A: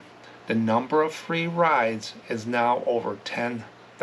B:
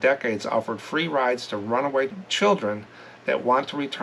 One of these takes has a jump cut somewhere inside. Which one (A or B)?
B